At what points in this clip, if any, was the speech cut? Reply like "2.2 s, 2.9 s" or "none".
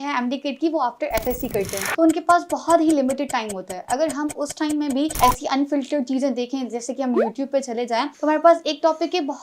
1.8 s, 5.1 s, 8.1 s